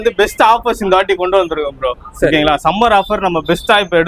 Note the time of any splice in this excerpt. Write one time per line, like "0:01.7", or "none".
none